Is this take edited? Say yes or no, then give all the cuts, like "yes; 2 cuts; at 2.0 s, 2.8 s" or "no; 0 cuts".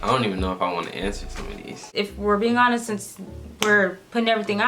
yes; 1 cut; at 1.9 s